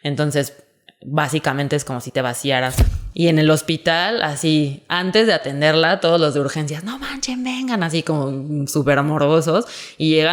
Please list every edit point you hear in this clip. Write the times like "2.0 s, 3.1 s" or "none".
2.8 s